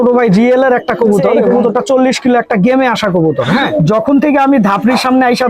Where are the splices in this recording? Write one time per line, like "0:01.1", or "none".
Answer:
0:01.4
0:03.7